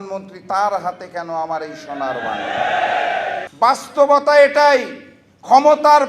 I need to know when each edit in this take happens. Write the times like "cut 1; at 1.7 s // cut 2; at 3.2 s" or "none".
cut 1; at 3.4 s